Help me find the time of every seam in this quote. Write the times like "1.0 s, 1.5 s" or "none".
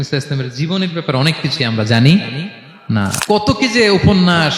3.2 s